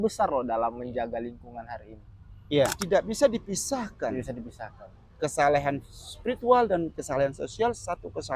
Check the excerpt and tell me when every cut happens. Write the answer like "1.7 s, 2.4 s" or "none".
2.8 s